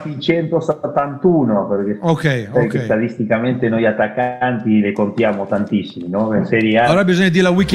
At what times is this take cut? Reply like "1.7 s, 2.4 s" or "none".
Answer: none